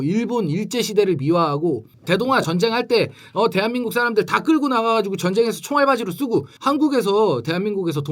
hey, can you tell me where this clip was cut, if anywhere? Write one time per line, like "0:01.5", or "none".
0:01.9
0:06.5